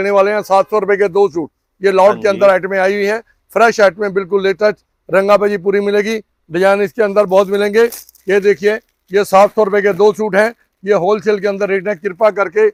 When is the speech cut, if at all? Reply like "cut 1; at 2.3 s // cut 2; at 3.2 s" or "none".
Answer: none